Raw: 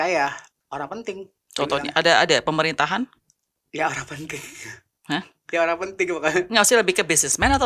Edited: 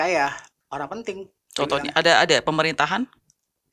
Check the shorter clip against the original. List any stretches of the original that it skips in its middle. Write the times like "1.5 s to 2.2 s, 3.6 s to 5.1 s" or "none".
none